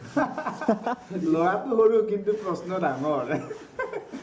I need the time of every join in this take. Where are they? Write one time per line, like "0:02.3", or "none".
none

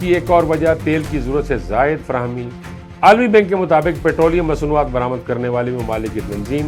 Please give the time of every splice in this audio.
0:02.8

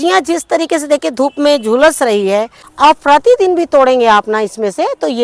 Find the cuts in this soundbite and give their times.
0:02.6

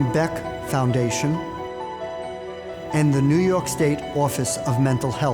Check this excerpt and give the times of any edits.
0:01.4
0:02.9

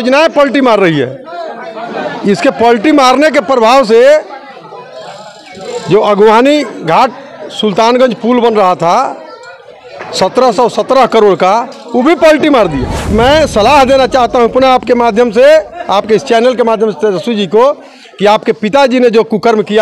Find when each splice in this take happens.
0:13.1

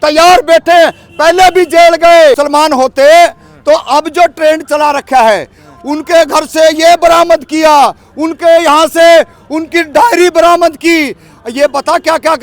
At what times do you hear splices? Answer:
0:02.4

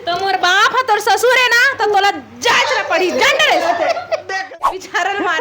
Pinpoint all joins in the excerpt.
0:04.3

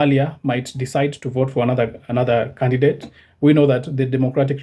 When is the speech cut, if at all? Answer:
none

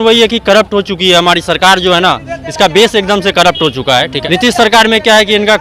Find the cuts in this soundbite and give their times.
0:04.2

